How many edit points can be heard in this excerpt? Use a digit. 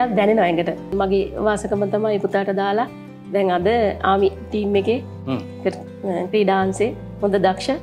1